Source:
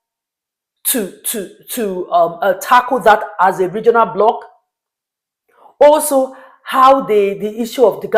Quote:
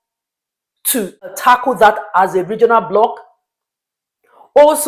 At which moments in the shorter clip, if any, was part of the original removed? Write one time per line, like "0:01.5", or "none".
0:01.4